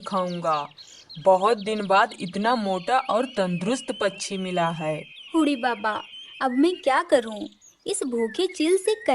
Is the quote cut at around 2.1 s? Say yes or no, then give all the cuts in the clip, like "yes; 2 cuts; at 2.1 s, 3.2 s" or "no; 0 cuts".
no; 1 cut; at 5.1 s